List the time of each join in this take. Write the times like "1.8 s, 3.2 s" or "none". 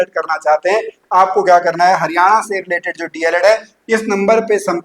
0.9 s